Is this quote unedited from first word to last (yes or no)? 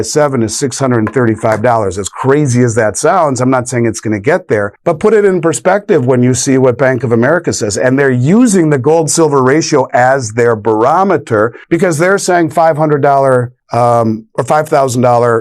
no